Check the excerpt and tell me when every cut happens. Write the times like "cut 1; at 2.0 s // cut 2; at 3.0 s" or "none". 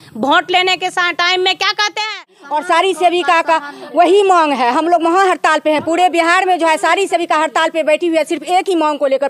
cut 1; at 2.4 s